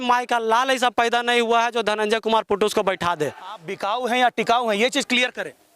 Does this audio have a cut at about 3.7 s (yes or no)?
yes